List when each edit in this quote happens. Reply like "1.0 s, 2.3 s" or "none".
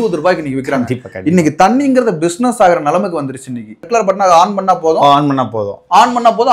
3.8 s